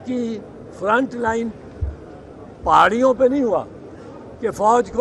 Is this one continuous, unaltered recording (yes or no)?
yes